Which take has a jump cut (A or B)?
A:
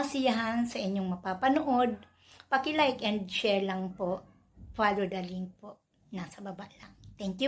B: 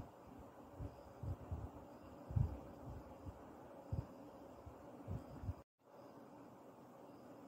B